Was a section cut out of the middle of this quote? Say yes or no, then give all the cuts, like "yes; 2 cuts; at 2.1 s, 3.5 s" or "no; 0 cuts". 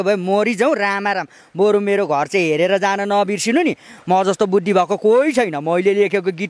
no; 0 cuts